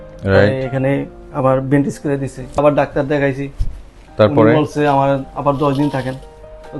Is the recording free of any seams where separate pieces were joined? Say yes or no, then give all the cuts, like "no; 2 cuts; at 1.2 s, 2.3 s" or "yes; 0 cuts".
no; 1 cut; at 2.6 s